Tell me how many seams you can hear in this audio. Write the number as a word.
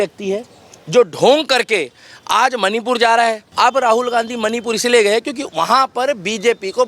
one